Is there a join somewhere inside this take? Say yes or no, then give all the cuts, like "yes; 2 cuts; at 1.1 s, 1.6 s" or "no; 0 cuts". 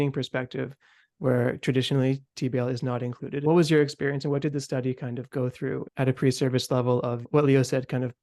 yes; 3 cuts; at 3.4 s, 5.8 s, 7.2 s